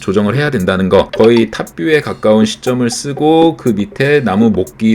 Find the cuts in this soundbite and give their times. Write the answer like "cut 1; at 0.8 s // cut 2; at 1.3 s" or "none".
cut 1; at 1.1 s